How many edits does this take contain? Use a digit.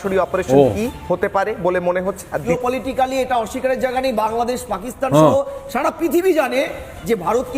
1